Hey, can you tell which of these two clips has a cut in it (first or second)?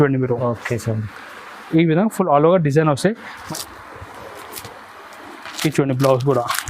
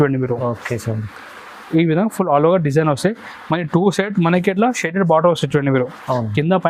first